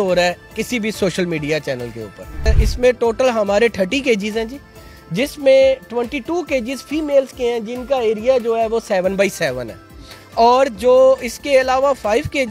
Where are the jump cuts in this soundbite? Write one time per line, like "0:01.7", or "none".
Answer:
0:02.5